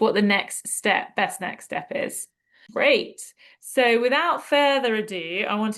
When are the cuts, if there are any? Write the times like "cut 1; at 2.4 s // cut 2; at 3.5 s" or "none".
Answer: cut 1; at 2.6 s